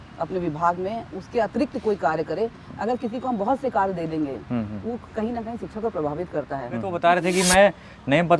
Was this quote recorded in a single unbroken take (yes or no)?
no